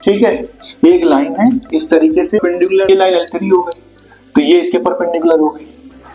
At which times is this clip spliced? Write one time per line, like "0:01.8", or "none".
0:02.9